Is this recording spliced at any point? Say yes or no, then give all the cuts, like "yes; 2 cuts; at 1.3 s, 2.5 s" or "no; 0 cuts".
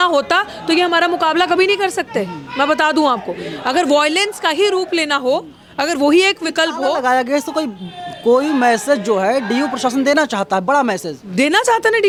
no; 0 cuts